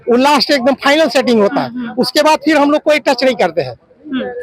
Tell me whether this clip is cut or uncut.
uncut